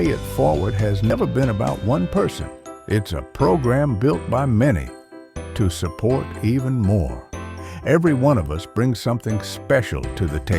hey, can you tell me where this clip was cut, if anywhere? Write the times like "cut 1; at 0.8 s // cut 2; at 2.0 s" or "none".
cut 1; at 1.1 s

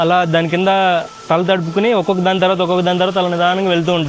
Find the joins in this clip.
none

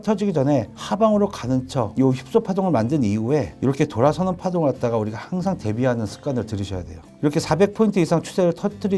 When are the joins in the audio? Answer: none

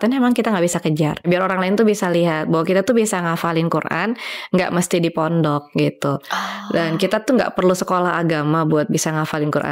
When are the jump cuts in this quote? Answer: cut 1; at 1.2 s

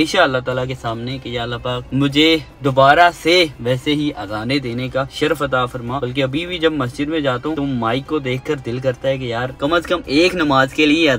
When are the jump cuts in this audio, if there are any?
none

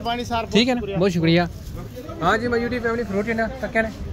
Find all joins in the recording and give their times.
none

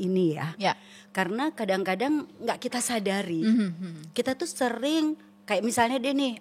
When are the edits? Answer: none

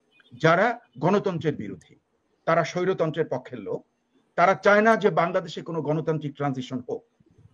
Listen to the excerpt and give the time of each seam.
none

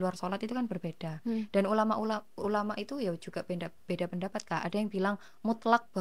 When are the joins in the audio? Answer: none

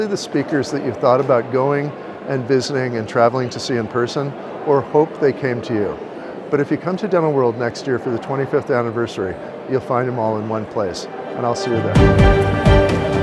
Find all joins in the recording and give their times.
cut 1; at 11.9 s

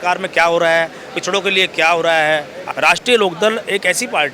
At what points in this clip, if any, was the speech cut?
cut 1; at 2.6 s

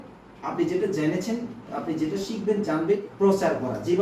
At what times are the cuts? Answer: cut 1; at 3.1 s

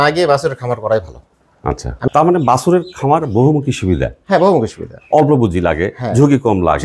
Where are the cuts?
cut 1; at 2.1 s

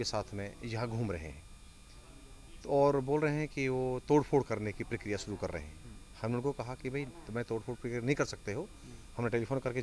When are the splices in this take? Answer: none

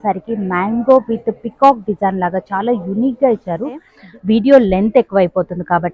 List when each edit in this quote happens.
cut 1; at 3.9 s

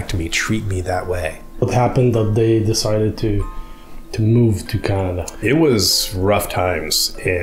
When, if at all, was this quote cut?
cut 1; at 1.6 s // cut 2; at 5.3 s

